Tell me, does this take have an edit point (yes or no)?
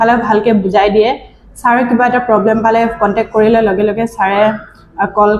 no